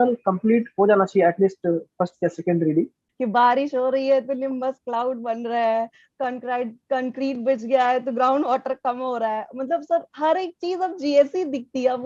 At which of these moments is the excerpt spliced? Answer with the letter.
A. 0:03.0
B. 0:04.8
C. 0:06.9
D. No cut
A